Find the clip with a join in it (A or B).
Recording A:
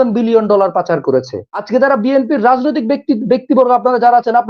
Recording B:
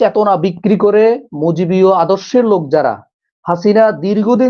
A